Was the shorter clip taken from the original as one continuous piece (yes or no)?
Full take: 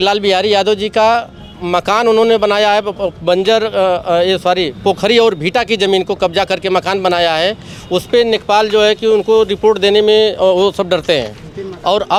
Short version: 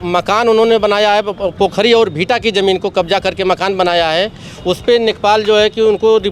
no